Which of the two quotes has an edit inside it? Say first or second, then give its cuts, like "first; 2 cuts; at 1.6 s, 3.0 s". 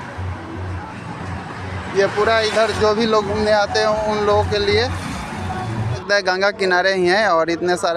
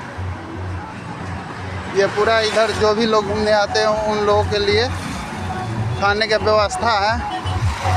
first; 1 cut; at 5.9 s